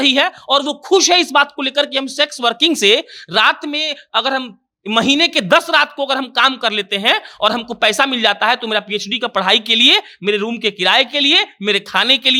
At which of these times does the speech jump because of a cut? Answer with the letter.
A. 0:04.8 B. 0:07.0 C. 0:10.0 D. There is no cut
D